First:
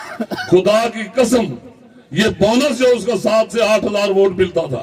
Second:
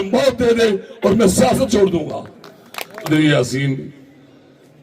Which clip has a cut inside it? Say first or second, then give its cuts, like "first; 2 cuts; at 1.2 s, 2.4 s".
second; 1 cut; at 3.1 s